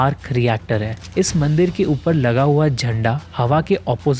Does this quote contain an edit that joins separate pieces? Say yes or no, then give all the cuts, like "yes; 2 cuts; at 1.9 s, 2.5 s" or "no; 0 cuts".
yes; 1 cut; at 1.0 s